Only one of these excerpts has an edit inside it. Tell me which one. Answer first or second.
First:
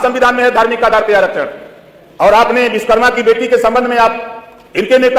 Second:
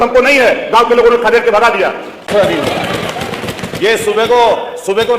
second